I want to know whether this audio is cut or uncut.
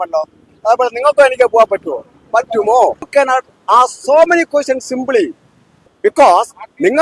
cut